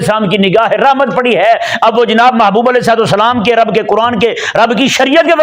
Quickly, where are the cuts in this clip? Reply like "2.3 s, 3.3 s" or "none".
none